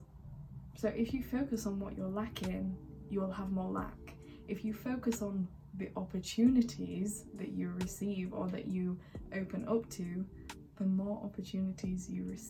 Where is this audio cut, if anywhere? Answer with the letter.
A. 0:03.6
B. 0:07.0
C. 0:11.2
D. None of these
D